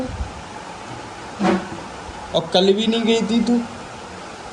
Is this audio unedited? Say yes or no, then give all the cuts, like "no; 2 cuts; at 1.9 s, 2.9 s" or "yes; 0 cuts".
yes; 0 cuts